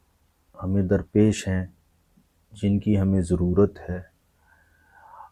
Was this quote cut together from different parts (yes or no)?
no